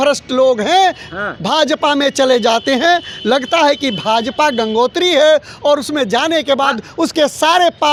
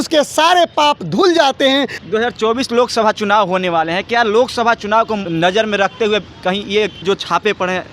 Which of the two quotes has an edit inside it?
second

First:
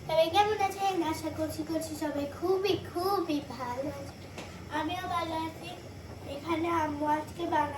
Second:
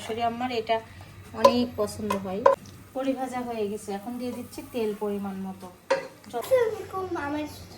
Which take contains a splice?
second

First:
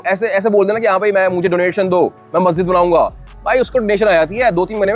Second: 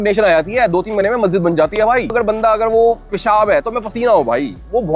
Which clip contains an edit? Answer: second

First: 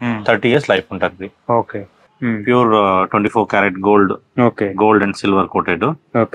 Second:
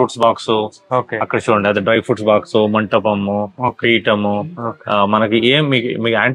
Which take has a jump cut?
first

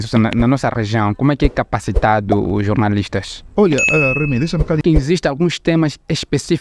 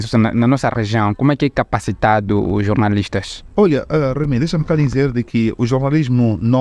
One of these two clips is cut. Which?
first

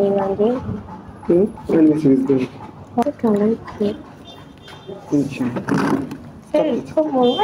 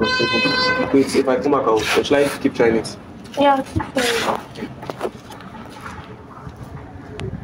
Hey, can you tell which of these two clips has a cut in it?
first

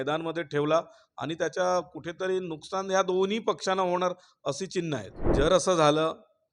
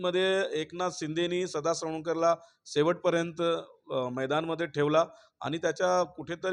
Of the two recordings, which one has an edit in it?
first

